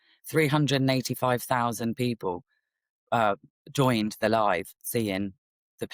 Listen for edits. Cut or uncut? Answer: uncut